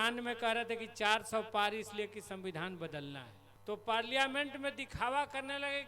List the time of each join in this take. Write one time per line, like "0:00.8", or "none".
0:03.3